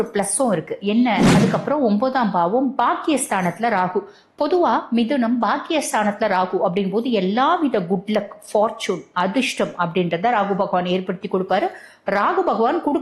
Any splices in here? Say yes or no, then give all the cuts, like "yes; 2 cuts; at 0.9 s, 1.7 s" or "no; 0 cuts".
yes; 1 cut; at 1.3 s